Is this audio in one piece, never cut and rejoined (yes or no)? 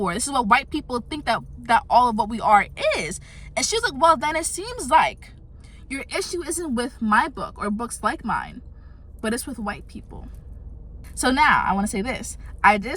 no